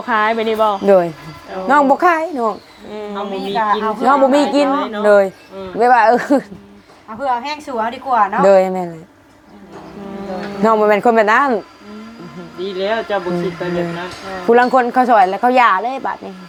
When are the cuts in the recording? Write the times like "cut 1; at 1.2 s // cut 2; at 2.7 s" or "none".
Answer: none